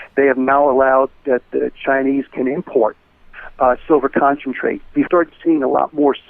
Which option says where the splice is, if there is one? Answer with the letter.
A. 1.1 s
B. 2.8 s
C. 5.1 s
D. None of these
C